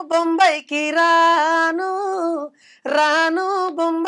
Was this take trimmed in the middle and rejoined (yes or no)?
no